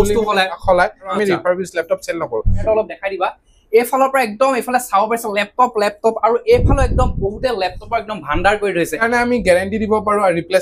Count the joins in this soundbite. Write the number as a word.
three